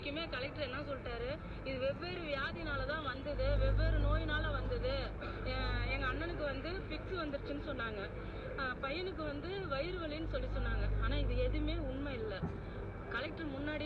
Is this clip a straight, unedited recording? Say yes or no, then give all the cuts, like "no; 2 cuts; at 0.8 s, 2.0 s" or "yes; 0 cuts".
yes; 0 cuts